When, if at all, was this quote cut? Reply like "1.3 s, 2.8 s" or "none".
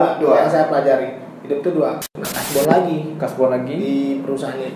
2.0 s